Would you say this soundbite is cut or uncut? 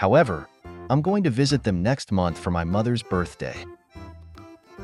uncut